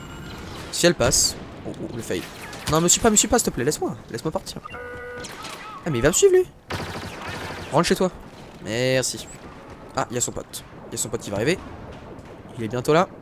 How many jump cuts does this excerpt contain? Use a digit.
1